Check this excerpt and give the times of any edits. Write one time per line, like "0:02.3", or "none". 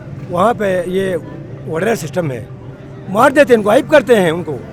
none